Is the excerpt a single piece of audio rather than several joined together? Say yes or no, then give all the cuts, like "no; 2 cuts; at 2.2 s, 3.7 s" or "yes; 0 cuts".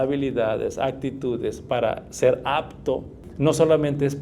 no; 1 cut; at 3.2 s